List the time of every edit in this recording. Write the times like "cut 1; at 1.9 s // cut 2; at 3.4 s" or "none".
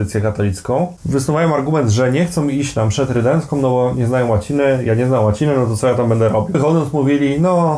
cut 1; at 1.0 s // cut 2; at 6.6 s